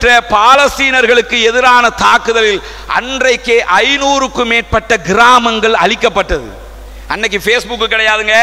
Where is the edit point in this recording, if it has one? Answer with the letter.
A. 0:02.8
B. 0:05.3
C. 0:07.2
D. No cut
D